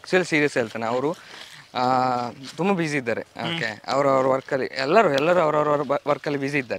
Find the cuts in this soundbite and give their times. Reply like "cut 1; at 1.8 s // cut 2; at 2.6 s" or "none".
none

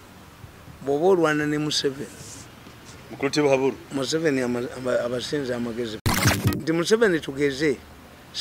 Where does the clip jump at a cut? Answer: cut 1; at 6.1 s

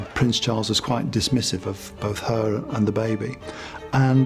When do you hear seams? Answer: none

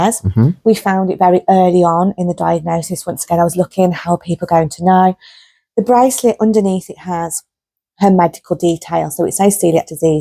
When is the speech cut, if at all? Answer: none

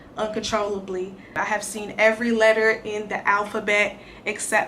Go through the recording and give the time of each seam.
cut 1; at 1.3 s

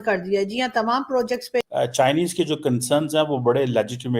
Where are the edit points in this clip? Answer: cut 1; at 1.7 s

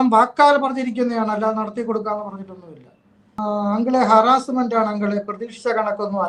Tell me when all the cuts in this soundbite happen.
cut 1; at 3.3 s

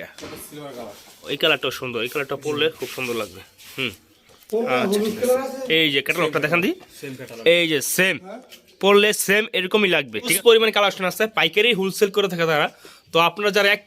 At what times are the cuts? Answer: cut 1; at 1.2 s // cut 2; at 10.3 s

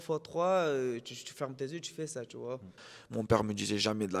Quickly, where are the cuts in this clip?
cut 1; at 2.8 s

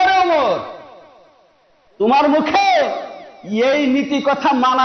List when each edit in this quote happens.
none

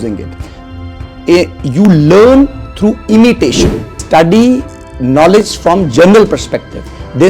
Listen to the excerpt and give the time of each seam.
cut 1; at 4.0 s

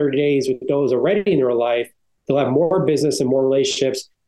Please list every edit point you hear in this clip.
none

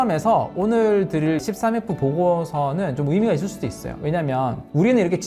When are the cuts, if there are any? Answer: cut 1; at 1.4 s

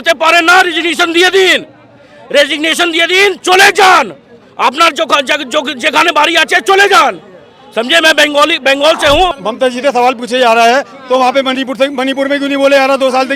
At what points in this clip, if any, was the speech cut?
cut 1; at 9.4 s

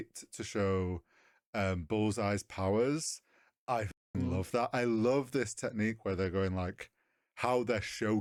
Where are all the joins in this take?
none

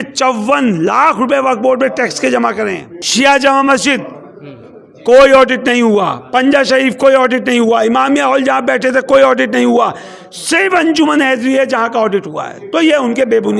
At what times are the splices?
cut 1; at 2.9 s

